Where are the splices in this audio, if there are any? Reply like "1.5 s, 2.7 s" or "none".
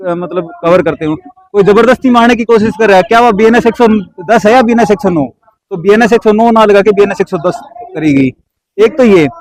none